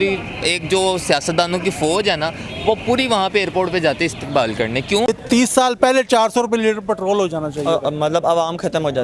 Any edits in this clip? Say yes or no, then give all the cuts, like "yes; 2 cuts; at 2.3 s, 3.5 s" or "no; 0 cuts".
yes; 1 cut; at 5.2 s